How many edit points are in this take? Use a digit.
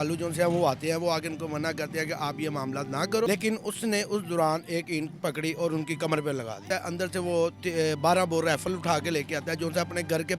2